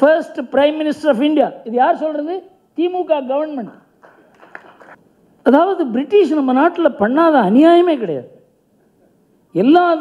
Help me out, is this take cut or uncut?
cut